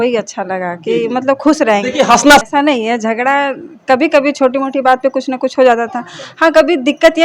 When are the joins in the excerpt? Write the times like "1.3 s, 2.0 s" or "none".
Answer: 2.4 s